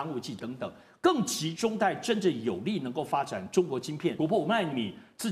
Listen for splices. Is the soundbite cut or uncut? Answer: cut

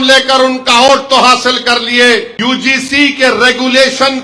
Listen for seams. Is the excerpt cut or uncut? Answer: cut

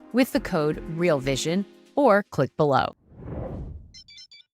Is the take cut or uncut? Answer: cut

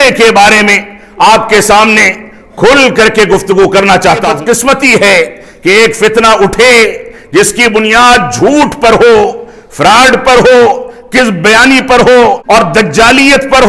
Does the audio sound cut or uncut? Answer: cut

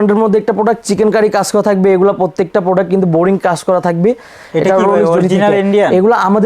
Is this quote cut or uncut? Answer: uncut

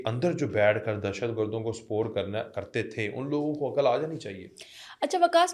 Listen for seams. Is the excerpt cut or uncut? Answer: uncut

